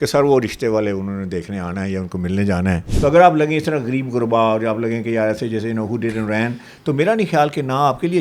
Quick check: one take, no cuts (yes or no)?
no